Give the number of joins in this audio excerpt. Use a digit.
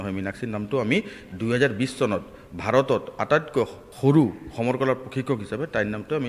1